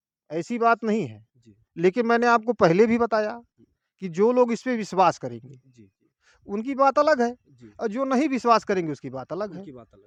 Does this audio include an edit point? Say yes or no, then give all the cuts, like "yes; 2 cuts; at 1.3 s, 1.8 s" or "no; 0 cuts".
no; 0 cuts